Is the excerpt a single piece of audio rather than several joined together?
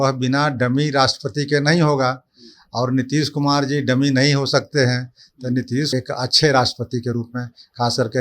no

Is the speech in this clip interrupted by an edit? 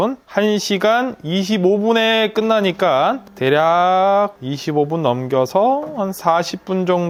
no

